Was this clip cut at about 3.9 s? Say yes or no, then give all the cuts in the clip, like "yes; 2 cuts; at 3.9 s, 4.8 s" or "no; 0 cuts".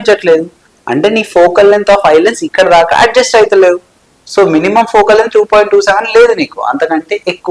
no; 0 cuts